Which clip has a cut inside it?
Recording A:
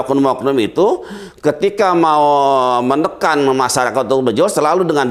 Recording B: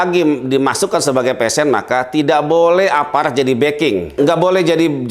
B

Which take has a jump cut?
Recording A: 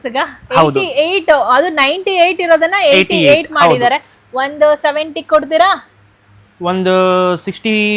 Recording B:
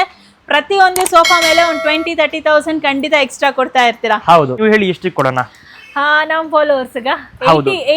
B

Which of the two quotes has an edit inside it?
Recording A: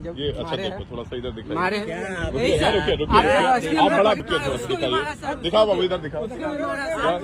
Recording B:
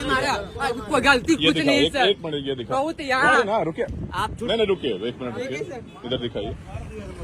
A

